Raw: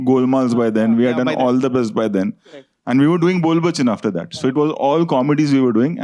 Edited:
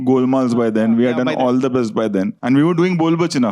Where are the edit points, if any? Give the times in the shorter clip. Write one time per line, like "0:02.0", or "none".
0:02.4

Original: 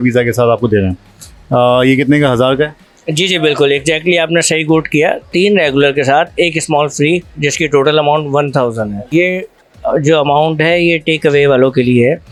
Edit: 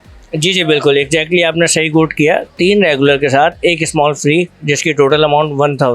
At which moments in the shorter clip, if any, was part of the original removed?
none

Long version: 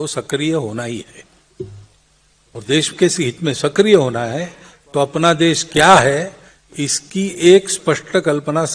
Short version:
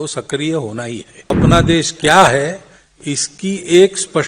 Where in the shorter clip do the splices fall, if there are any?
0:01.3

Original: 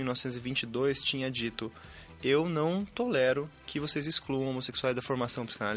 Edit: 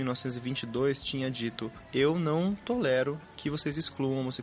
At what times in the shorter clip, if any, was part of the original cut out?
0:01.7

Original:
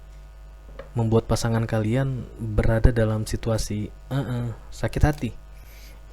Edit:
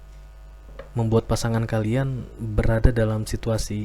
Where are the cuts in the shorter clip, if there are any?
none

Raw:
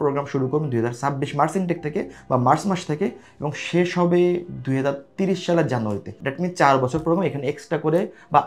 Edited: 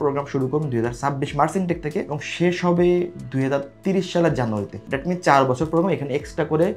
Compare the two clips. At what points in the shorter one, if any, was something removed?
0:02.2

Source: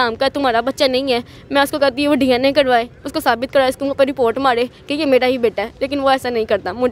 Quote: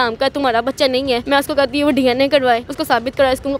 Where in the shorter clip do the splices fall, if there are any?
0:01.2
0:02.7

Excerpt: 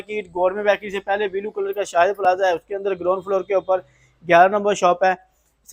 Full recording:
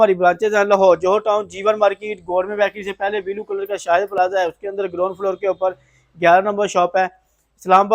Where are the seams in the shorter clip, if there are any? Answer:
none

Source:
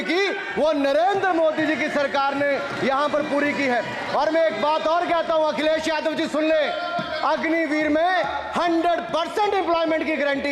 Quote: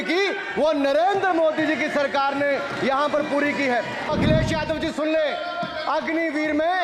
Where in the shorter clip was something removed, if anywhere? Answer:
0:04.1

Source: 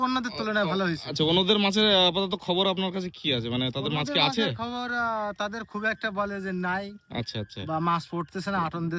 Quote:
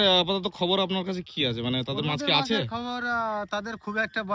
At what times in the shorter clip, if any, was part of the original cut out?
none

